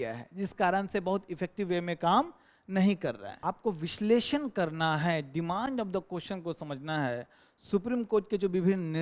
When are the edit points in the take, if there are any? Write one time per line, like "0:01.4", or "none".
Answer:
0:03.3